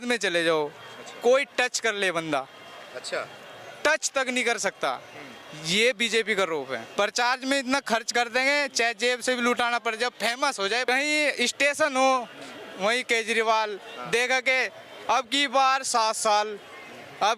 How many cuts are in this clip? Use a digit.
2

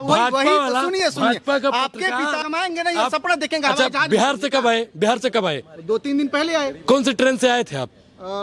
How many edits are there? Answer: 1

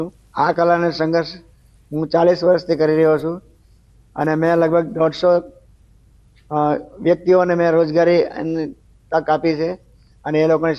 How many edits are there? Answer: 1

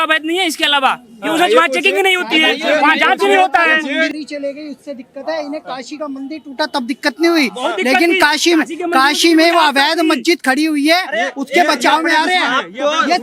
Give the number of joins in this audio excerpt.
1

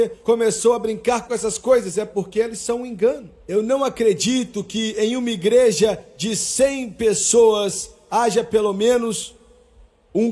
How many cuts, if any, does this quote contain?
1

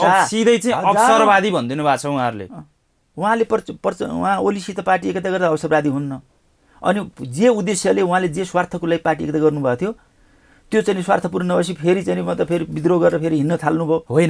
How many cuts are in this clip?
0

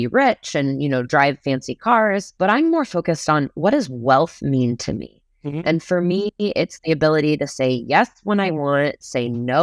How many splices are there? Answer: 1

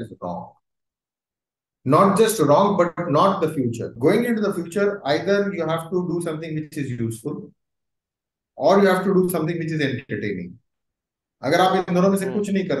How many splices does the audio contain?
1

